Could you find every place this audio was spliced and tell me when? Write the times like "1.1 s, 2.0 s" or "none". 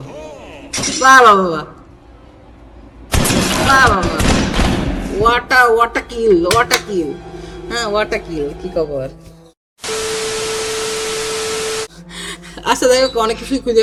none